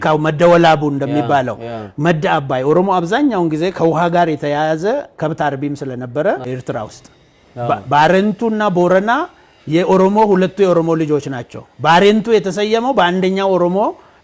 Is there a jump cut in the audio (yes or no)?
yes